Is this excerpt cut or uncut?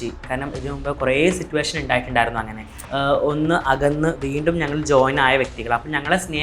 cut